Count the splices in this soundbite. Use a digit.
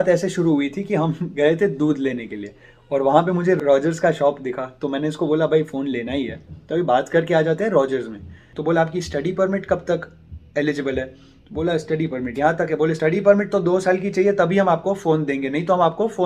3